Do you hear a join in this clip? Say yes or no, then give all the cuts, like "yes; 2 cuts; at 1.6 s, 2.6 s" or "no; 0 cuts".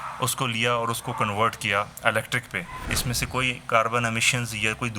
yes; 1 cut; at 2.9 s